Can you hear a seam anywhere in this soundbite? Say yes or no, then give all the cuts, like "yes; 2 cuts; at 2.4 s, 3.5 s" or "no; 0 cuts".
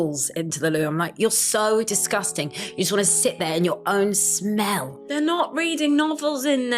no; 0 cuts